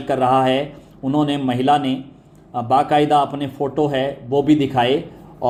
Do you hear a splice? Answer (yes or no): no